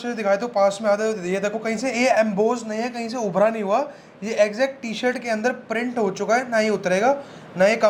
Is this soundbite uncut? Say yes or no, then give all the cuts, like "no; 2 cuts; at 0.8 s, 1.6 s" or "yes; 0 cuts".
yes; 0 cuts